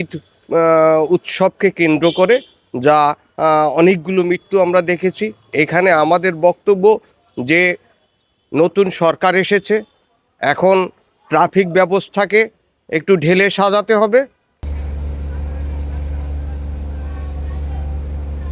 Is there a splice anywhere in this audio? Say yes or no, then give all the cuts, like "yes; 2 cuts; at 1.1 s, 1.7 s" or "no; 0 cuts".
no; 0 cuts